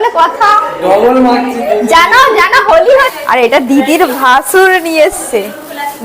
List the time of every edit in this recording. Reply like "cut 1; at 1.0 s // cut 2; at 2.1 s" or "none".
cut 1; at 3.0 s